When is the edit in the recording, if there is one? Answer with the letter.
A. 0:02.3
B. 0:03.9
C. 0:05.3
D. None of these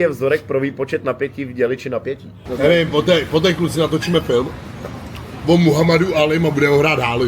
A